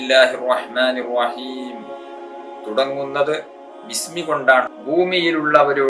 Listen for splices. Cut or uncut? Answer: cut